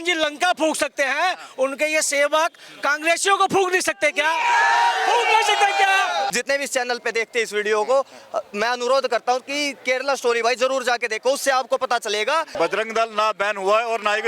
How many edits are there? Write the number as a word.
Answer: two